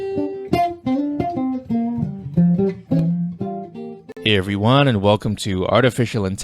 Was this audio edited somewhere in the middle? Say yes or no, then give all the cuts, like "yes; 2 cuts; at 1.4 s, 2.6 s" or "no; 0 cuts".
no; 0 cuts